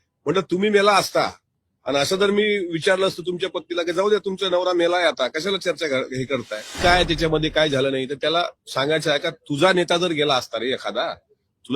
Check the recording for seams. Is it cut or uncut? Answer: cut